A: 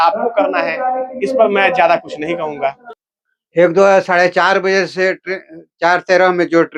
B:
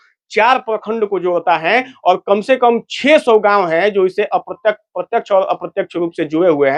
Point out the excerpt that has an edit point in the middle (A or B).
A